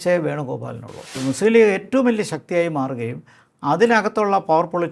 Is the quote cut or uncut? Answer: cut